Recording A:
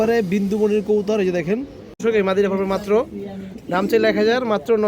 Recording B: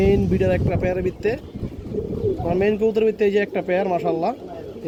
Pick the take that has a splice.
A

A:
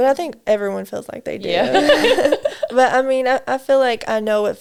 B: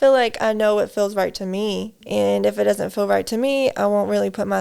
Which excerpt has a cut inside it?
B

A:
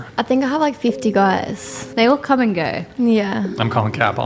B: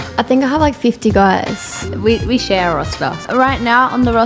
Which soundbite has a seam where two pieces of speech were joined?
B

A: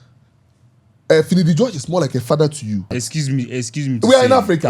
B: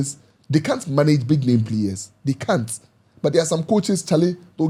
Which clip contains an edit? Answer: A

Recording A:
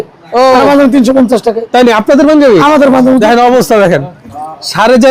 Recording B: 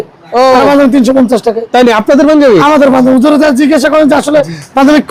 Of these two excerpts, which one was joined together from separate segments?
A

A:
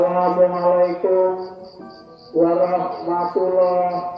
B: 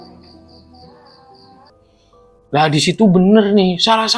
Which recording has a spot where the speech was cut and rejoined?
B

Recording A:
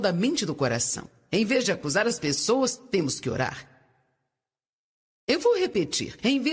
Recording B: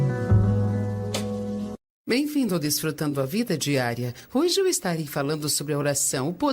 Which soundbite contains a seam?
B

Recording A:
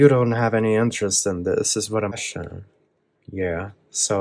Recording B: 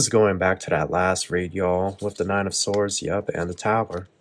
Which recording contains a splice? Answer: A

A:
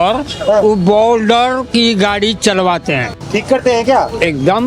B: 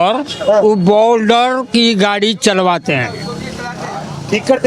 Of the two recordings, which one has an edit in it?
A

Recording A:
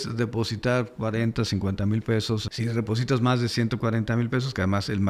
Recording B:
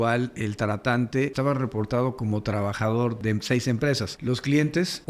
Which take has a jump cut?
B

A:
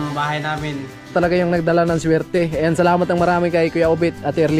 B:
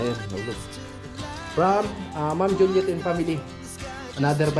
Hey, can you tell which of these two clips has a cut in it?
A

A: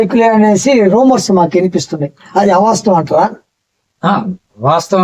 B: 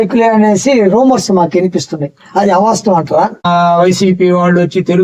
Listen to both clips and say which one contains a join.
B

